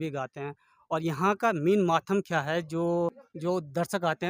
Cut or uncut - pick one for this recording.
cut